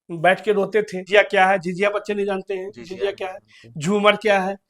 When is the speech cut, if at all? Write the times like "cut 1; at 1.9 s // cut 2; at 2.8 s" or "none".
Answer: cut 1; at 1.0 s